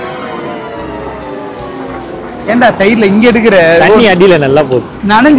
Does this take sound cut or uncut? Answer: uncut